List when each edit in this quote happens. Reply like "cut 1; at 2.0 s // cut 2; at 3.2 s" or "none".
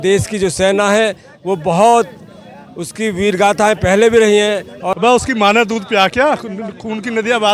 cut 1; at 4.8 s